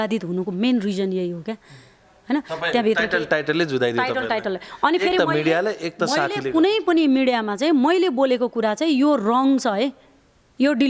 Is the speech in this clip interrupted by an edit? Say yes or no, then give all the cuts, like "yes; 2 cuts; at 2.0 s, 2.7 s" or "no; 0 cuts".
no; 0 cuts